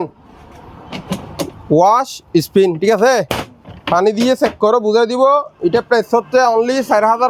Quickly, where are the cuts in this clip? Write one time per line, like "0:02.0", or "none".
none